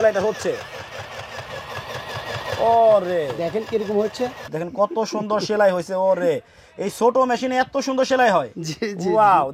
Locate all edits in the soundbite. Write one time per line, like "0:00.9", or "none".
0:04.5

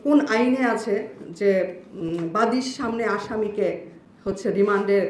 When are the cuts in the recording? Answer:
none

